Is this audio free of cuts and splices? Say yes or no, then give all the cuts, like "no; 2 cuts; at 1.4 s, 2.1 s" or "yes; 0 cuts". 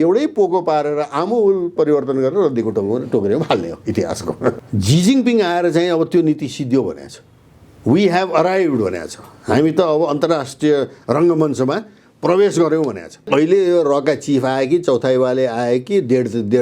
no; 2 cuts; at 4.6 s, 13.2 s